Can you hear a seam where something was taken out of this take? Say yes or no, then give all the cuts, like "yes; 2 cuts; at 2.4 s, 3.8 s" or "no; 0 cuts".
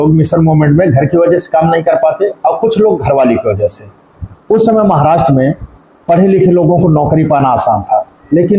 no; 0 cuts